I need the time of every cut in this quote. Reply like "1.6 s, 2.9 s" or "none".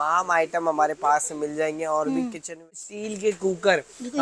2.6 s